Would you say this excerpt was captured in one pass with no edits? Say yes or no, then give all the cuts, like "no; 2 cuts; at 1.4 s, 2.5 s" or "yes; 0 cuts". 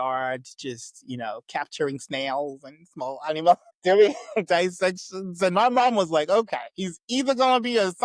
yes; 0 cuts